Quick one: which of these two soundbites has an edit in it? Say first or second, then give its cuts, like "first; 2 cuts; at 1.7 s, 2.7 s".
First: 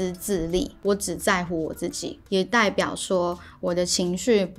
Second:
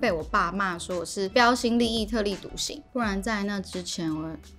second; 1 cut; at 2.8 s